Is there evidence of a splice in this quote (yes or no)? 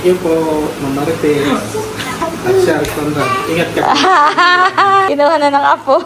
yes